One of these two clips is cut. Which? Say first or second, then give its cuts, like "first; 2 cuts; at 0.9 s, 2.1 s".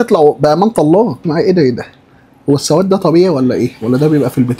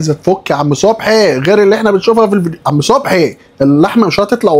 first; 1 cut; at 1.2 s